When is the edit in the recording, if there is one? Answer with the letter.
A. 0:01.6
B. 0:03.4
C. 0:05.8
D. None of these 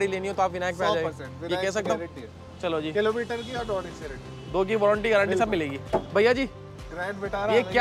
C